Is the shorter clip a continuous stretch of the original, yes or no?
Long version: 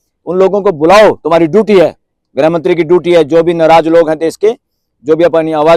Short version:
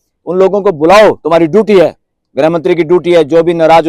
yes